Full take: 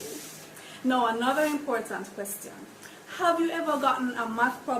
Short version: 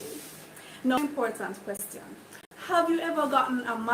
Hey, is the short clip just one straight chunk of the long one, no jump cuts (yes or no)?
no